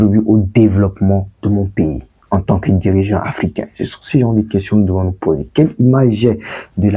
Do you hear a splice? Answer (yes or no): no